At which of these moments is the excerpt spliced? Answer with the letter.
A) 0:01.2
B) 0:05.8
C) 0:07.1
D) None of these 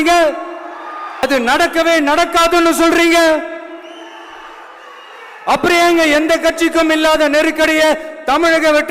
A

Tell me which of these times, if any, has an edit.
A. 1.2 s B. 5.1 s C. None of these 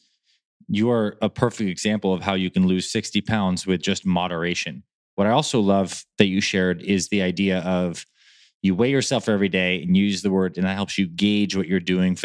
B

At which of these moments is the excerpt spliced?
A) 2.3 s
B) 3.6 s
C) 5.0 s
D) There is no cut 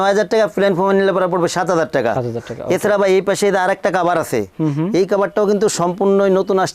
D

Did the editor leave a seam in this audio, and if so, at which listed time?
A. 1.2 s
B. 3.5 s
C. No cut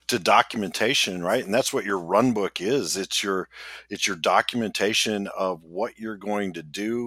C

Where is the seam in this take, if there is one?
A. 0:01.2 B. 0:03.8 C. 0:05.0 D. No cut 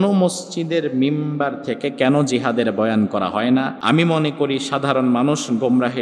B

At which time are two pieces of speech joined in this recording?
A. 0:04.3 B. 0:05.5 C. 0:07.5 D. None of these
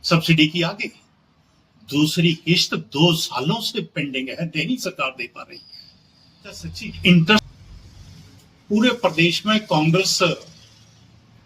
C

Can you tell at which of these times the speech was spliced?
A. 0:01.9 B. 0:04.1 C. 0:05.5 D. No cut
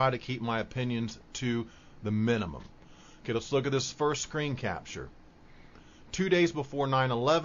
D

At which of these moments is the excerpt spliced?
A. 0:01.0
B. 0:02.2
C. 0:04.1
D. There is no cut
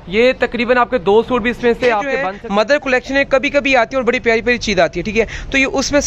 B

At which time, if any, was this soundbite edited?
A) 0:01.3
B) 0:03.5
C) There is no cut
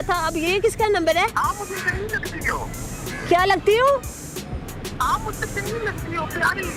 A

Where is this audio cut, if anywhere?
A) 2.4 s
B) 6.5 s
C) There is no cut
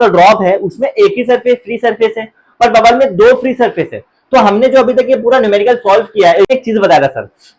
B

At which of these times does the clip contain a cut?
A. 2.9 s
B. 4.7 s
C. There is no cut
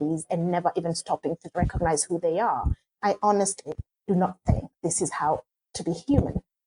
A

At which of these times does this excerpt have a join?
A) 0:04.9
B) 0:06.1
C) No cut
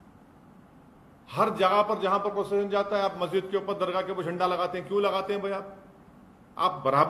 C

